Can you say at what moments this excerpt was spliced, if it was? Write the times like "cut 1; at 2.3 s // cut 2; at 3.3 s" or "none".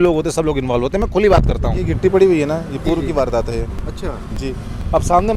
cut 1; at 1.9 s

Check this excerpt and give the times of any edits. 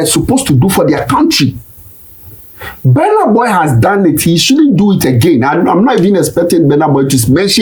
none

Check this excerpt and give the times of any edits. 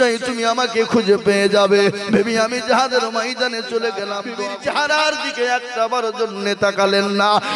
cut 1; at 4.2 s

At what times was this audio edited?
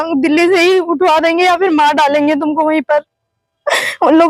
none

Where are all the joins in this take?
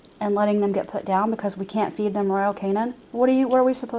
none

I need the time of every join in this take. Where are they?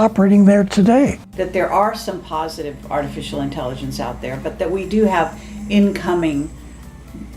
cut 1; at 1.2 s

